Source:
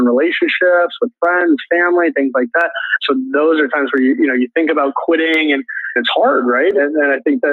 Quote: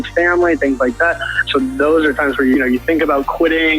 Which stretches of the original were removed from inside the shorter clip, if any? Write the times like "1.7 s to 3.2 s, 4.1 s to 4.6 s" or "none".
4.1 s to 4.2 s